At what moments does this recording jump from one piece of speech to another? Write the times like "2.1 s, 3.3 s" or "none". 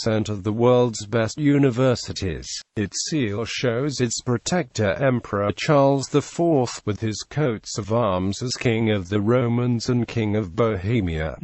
1.5 s, 9.0 s